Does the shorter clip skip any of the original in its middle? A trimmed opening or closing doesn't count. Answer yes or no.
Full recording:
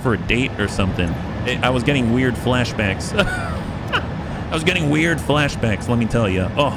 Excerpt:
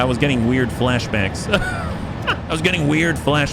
yes